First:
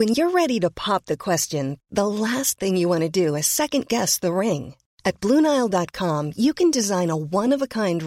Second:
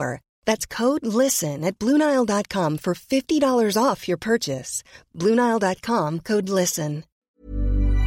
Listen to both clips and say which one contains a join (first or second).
second